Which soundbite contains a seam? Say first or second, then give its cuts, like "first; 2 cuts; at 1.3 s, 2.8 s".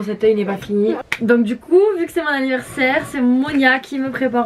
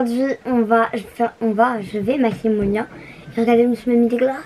first; 1 cut; at 1.0 s